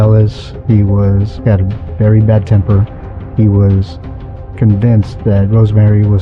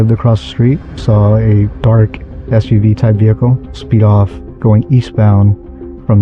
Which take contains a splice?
second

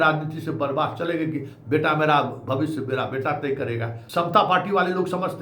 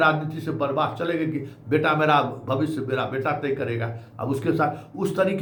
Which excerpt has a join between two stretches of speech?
first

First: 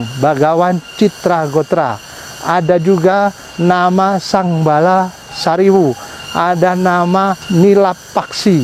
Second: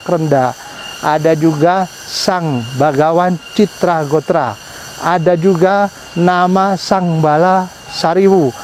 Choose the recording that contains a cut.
first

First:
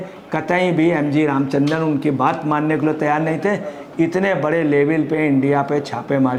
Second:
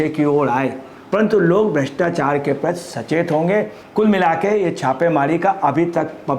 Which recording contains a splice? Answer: second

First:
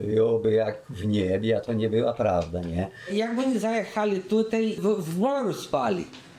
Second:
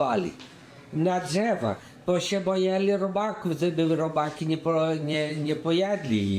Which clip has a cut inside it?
first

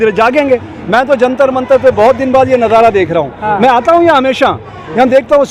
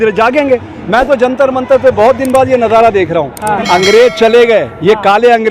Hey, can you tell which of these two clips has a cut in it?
second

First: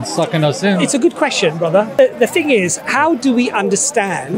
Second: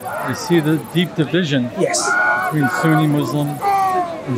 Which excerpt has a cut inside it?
first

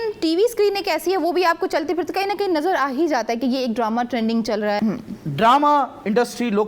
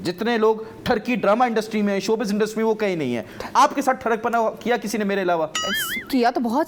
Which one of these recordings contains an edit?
first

